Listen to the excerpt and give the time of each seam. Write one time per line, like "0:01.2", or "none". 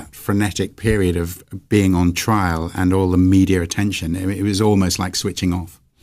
0:03.1